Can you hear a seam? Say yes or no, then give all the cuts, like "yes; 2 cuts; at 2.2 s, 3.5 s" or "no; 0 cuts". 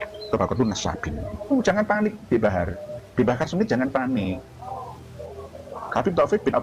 yes; 1 cut; at 1.5 s